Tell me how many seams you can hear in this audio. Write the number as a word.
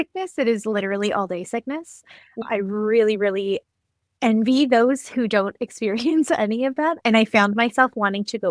one